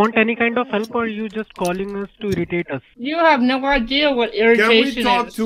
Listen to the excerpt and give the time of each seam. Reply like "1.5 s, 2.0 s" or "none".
2.9 s

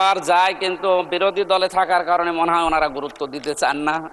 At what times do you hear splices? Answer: none

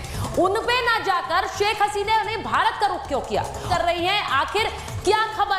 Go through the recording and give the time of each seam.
3.6 s

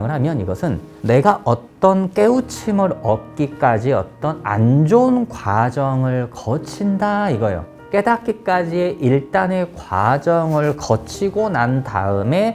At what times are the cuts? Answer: 7.7 s

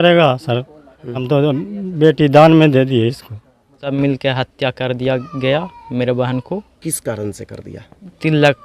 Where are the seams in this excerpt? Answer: 1.2 s, 3.8 s

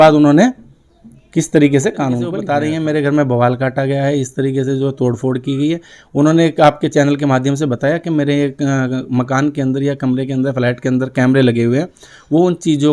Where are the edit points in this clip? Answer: 2.4 s

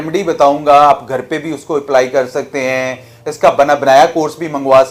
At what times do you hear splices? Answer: none

